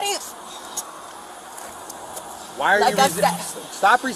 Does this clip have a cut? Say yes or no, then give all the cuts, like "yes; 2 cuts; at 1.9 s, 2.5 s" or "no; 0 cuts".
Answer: no; 0 cuts